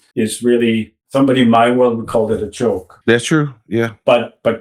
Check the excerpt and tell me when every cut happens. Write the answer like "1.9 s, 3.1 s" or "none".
1.0 s, 2.9 s

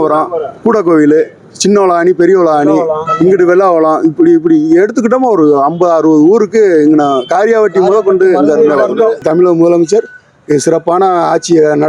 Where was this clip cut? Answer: 9.2 s

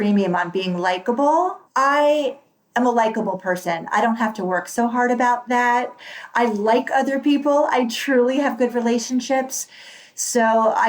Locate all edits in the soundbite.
1.6 s

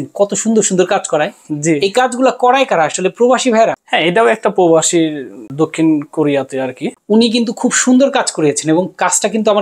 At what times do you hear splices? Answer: 3.8 s, 5.4 s, 6.9 s

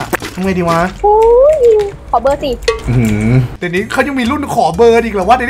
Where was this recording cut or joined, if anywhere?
3.8 s

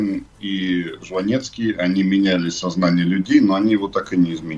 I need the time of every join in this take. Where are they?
none

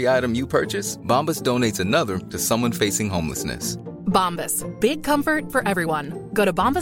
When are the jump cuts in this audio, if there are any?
none

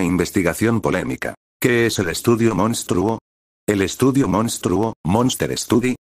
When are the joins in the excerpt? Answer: 1.4 s

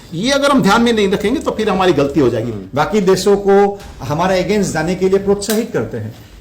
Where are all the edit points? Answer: 2.5 s

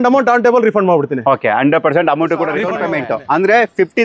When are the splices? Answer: 2.7 s

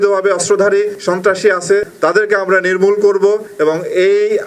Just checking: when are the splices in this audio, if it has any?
1.0 s, 1.9 s, 3.5 s

